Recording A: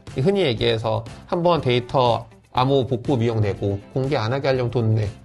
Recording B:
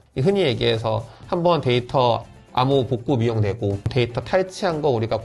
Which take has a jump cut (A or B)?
A